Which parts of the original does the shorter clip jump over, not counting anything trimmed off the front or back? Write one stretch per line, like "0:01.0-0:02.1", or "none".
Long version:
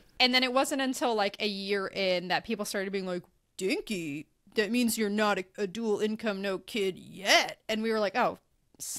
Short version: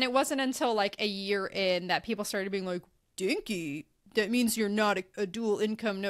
none